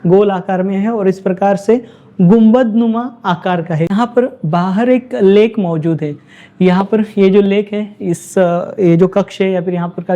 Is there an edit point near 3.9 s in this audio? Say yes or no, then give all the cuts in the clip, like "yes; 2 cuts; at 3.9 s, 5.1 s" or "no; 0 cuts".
yes; 1 cut; at 3.9 s